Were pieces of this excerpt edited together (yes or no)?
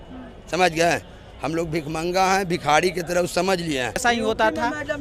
yes